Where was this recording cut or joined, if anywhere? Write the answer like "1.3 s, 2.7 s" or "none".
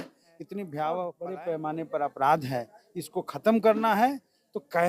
1.2 s